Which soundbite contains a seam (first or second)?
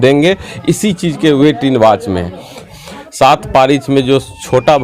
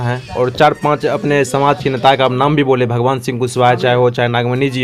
first